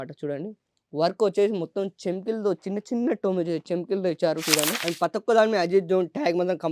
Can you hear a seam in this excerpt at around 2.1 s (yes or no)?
no